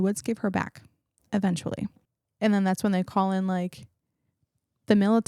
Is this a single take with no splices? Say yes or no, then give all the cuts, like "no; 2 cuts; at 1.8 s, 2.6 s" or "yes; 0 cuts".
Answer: no; 1 cut; at 2.0 s